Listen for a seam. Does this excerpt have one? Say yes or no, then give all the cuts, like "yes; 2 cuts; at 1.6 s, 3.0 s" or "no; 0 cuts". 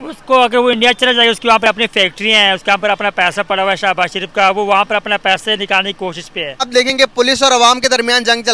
yes; 1 cut; at 6.7 s